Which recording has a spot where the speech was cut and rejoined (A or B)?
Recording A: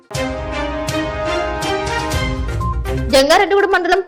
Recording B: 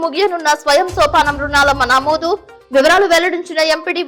A